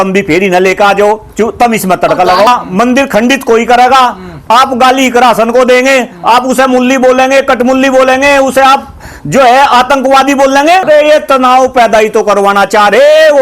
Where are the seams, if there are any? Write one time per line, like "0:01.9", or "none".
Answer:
0:02.5
0:10.8